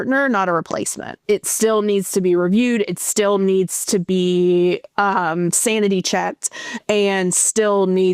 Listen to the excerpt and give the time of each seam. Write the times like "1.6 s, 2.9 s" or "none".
1.2 s